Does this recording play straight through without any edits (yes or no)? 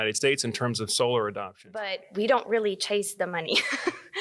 no